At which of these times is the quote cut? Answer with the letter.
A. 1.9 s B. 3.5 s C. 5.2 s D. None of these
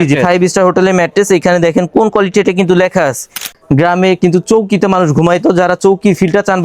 B